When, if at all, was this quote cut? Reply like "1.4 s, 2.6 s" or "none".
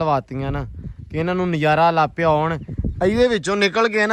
none